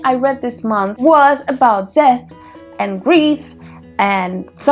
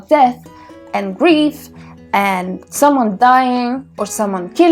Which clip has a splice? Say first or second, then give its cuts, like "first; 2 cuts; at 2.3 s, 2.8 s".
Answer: first; 1 cut; at 0.9 s